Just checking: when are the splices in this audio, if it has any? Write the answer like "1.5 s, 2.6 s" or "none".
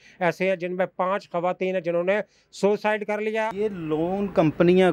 3.5 s